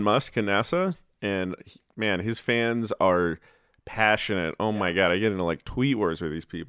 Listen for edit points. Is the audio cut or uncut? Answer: uncut